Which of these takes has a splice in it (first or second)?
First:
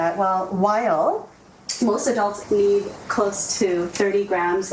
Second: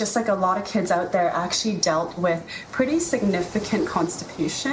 first